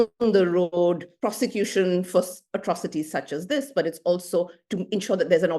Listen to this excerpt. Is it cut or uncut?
cut